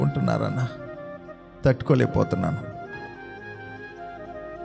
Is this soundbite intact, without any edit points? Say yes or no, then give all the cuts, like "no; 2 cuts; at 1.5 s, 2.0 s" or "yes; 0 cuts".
no; 1 cut; at 3.0 s